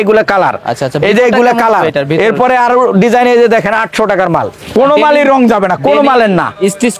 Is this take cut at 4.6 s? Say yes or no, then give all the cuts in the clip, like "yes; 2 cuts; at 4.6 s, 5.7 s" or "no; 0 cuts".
yes; 1 cut; at 4.6 s